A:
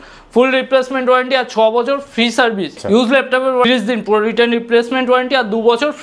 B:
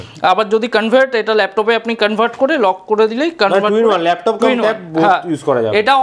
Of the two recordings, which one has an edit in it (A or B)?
A